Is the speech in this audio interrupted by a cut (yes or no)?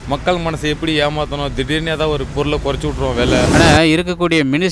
yes